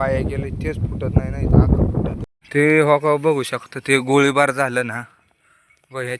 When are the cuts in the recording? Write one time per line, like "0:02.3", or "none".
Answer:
0:02.2